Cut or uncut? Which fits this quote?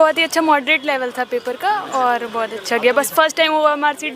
uncut